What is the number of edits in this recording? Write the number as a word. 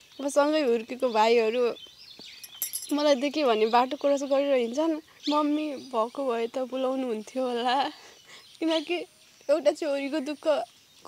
one